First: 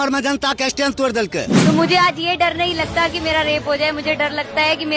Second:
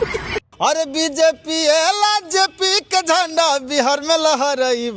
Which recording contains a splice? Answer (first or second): first